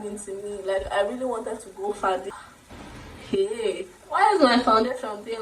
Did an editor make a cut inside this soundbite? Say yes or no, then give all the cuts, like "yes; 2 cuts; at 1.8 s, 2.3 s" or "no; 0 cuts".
yes; 1 cut; at 2.2 s